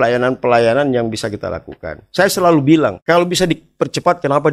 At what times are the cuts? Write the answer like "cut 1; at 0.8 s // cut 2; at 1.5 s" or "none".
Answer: cut 1; at 3.0 s